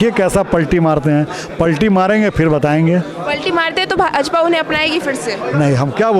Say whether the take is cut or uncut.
uncut